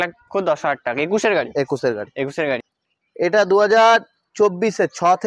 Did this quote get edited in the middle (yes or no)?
yes